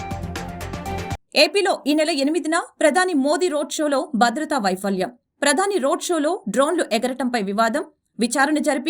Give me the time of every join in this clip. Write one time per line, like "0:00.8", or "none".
0:00.9